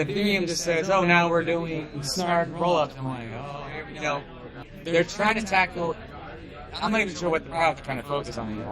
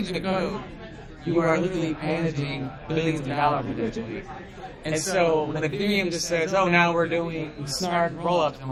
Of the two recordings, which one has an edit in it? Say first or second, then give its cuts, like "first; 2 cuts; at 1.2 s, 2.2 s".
first; 1 cut; at 4.5 s